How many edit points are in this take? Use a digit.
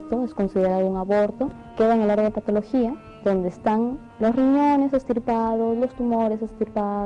1